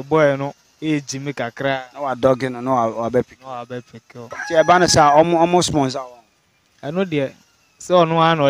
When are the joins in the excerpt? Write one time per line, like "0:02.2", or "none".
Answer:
0:04.4